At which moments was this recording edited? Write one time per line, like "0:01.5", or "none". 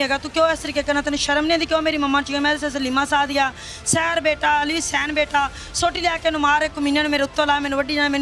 none